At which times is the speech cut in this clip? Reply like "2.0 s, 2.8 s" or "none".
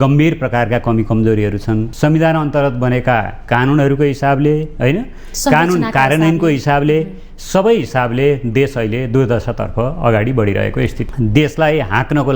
1.9 s, 11.0 s